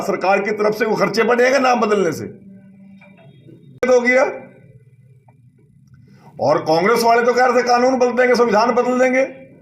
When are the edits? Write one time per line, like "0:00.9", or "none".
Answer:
0:03.8